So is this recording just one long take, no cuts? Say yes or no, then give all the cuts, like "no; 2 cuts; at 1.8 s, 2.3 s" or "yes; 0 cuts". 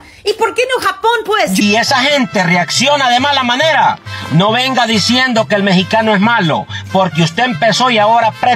no; 1 cut; at 1.6 s